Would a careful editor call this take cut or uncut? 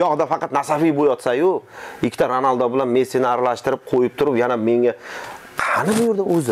uncut